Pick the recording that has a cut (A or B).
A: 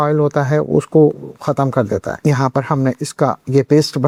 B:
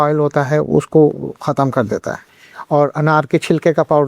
B